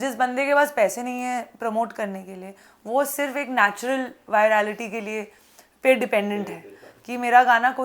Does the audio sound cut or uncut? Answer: uncut